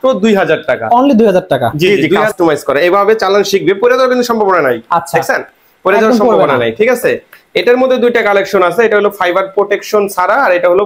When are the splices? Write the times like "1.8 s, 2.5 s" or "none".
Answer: 2.1 s